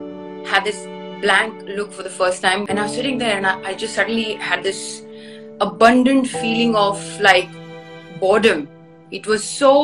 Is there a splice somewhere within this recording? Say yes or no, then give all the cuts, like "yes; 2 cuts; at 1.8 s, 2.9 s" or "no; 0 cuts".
yes; 1 cut; at 2.6 s